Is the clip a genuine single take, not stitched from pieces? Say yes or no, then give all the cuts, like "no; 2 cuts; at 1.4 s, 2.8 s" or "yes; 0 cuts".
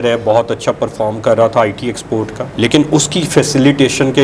yes; 0 cuts